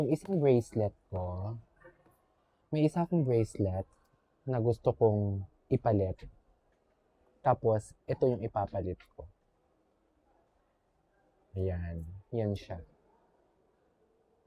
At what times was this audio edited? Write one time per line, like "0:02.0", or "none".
none